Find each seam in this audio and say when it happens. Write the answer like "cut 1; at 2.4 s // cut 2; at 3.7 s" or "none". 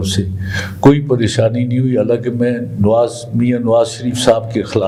none